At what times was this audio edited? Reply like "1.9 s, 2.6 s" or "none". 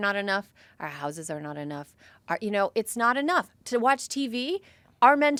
none